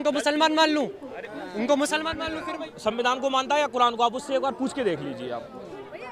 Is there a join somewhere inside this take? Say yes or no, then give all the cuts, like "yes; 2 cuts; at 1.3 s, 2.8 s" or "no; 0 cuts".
yes; 1 cut; at 2.7 s